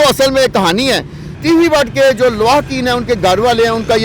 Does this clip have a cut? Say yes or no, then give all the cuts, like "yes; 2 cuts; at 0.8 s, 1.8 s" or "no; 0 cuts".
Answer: yes; 1 cut; at 1.3 s